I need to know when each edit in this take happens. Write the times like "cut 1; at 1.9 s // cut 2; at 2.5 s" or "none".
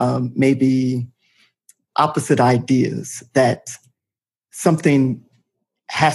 none

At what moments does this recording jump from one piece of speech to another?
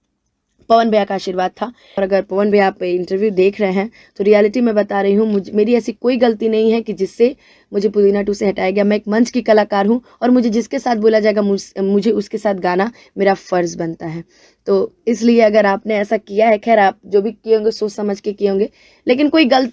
cut 1; at 2.0 s

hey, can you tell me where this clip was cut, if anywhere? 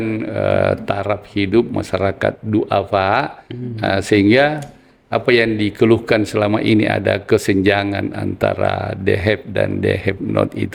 none

